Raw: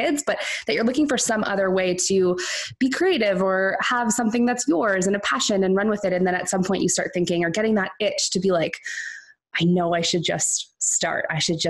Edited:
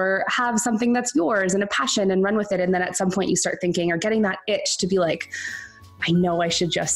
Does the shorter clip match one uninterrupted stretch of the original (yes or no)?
yes